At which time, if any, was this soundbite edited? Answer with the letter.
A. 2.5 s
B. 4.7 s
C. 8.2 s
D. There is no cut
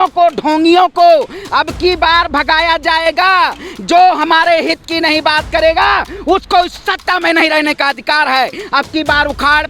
D